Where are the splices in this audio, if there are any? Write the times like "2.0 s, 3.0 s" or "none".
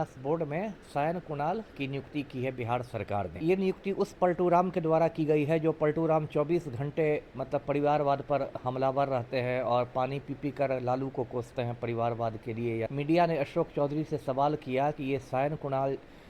3.4 s, 12.9 s